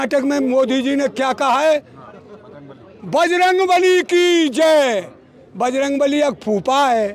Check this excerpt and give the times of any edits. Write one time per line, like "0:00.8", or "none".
none